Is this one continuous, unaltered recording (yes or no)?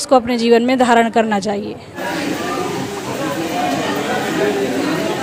yes